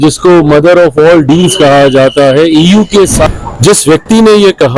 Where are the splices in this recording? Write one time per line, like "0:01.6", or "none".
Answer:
0:03.3

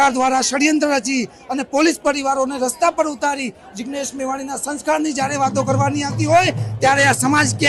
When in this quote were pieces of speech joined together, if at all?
none

